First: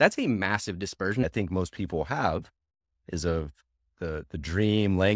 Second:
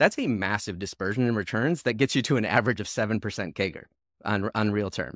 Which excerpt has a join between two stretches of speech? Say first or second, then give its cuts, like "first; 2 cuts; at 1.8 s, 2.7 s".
first; 1 cut; at 1.2 s